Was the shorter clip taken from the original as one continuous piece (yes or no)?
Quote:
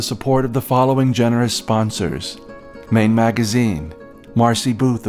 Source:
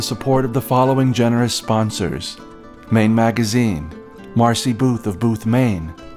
yes